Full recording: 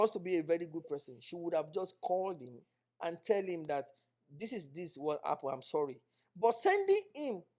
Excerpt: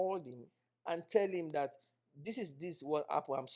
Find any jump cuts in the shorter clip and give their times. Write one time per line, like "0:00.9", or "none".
none

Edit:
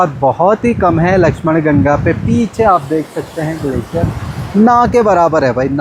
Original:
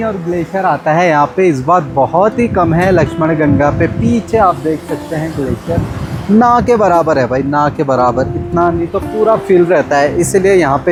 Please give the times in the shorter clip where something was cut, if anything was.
none

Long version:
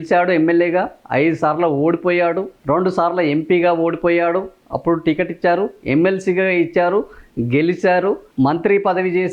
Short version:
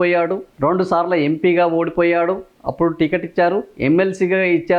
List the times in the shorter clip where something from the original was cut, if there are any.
none

